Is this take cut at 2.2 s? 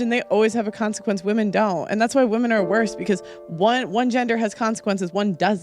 yes; 1 cut; at 2.2 s

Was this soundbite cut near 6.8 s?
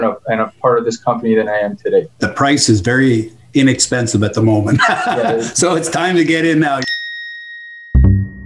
yes; 2 cuts; at 2.2 s, 6.8 s

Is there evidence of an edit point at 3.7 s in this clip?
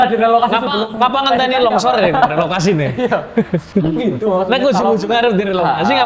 yes; 1 cut; at 3.7 s

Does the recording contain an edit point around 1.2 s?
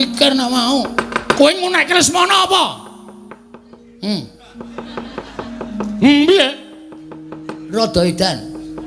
yes; 1 cut; at 1.2 s

